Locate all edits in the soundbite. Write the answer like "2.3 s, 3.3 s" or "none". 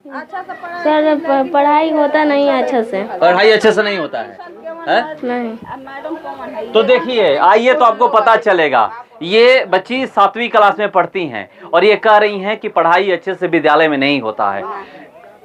none